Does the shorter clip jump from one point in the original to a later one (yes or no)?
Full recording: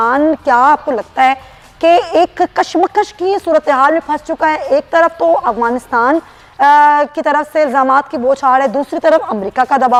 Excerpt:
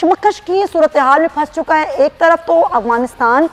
no